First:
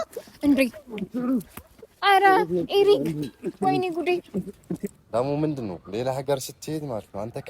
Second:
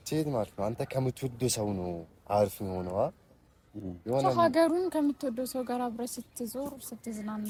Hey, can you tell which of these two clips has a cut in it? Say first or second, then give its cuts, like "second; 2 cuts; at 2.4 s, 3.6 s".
first; 1 cut; at 4.9 s